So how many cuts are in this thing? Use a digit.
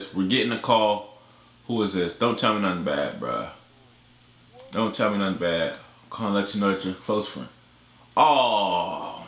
0